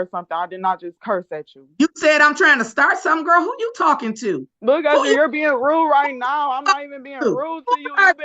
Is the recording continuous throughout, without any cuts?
no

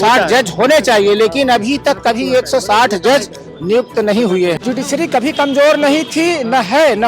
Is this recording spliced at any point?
yes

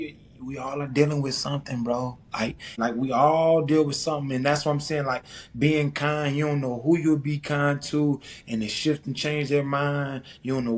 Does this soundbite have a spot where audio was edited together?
yes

